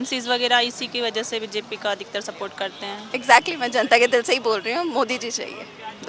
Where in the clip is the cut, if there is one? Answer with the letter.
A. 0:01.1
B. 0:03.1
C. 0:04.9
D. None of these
B